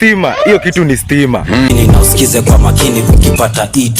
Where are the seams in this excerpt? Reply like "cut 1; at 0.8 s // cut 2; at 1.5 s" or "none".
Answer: cut 1; at 1.3 s